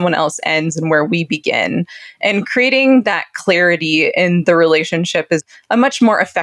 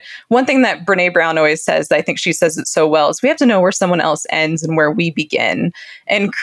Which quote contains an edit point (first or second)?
first